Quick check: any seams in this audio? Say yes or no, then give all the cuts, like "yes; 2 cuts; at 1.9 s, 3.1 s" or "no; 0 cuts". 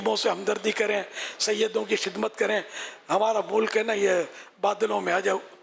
no; 0 cuts